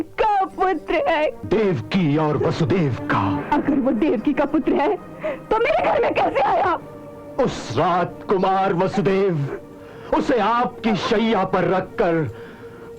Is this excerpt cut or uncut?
cut